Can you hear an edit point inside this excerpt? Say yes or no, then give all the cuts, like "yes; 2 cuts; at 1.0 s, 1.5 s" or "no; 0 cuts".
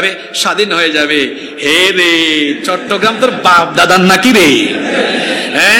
no; 0 cuts